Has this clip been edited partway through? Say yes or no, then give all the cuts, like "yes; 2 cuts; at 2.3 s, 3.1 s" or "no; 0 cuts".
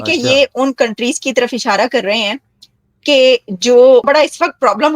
yes; 1 cut; at 4.0 s